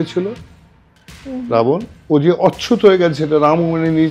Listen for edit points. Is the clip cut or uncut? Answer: cut